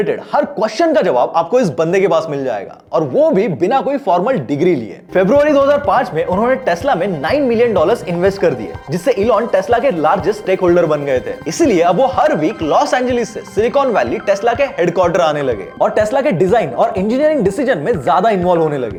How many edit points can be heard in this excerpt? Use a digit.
0